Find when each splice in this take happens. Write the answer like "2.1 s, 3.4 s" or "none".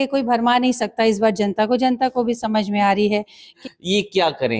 3.6 s